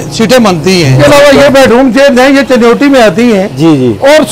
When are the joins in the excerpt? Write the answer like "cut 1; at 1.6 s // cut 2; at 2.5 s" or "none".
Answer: cut 1; at 1.0 s